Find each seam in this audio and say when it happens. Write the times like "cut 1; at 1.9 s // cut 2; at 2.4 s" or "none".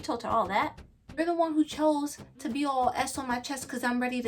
cut 1; at 1.2 s

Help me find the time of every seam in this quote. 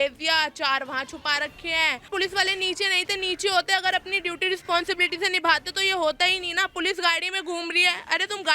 cut 1; at 2.1 s

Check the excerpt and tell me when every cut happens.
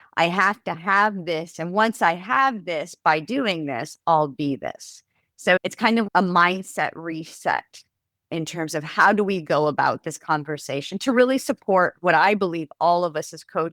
cut 1; at 5.6 s // cut 2; at 8.3 s

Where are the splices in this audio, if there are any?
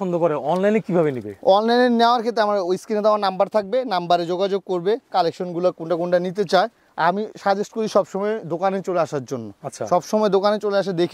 none

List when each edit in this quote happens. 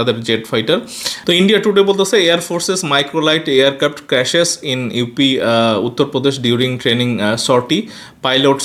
none

